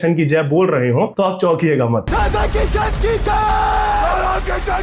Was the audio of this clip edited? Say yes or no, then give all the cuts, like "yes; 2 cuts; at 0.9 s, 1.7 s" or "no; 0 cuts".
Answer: yes; 2 cuts; at 1.1 s, 2.1 s